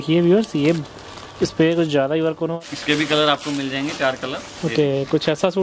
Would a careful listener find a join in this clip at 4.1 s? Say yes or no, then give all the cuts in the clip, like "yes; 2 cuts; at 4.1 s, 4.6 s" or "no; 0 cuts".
no; 1 cut; at 2.6 s